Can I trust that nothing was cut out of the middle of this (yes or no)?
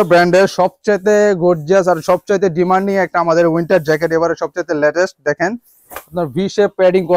yes